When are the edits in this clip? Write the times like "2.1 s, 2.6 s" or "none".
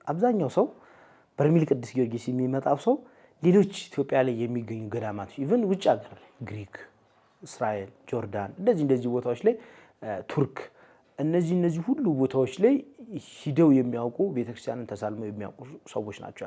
none